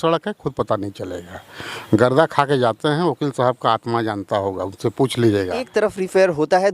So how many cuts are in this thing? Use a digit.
1